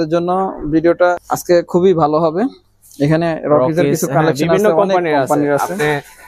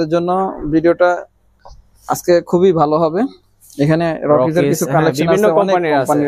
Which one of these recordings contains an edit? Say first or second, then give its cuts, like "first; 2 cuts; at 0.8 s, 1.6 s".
first; 1 cut; at 1.3 s